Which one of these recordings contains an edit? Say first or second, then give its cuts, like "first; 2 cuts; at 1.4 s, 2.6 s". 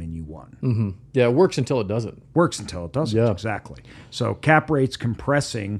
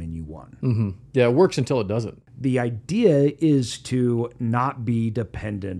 second; 1 cut; at 2.1 s